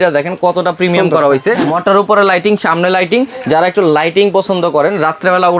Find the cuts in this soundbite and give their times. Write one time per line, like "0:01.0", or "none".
0:01.6